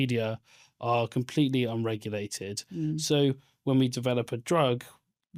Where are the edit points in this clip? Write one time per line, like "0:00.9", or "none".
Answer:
none